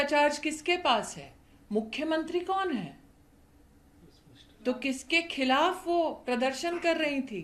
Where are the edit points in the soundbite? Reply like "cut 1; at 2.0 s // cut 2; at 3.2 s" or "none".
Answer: none